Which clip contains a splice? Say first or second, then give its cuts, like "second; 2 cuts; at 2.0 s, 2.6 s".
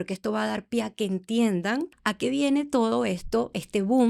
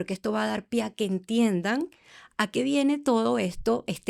first; 1 cut; at 2.0 s